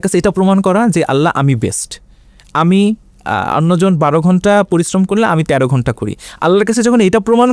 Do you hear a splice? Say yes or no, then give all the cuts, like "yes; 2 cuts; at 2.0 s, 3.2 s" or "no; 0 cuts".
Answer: no; 0 cuts